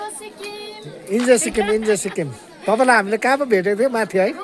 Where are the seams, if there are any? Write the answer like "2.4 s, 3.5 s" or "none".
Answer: none